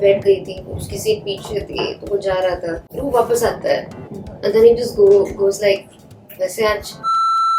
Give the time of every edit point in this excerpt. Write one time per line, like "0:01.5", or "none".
0:02.9